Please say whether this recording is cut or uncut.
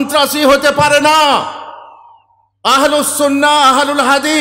uncut